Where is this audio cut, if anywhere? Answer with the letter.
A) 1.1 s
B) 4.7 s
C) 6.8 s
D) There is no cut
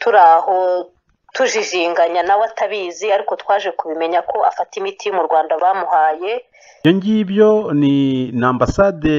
C